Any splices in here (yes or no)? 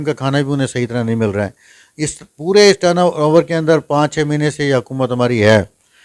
no